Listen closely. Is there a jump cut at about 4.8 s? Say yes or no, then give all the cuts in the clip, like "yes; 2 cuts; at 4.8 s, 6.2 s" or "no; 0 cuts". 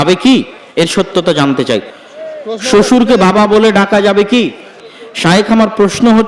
yes; 2 cuts; at 1.9 s, 4.8 s